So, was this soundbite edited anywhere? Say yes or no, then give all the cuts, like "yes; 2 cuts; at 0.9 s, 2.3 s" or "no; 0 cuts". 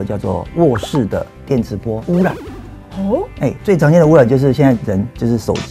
no; 0 cuts